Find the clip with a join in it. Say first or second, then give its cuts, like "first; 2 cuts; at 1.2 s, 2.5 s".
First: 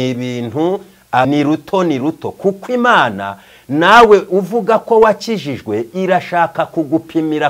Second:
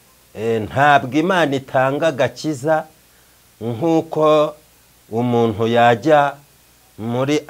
first; 1 cut; at 1.3 s